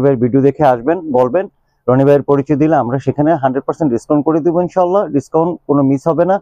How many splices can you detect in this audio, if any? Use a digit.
0